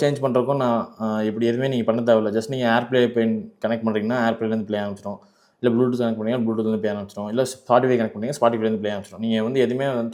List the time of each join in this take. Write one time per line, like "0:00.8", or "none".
none